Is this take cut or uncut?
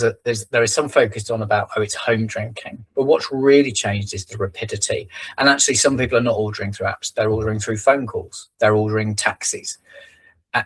uncut